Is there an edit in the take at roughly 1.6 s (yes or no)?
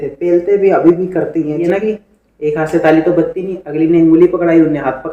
yes